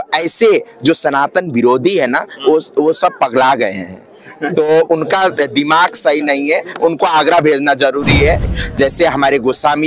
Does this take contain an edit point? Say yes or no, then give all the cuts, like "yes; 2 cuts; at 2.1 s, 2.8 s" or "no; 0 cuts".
yes; 1 cut; at 8.5 s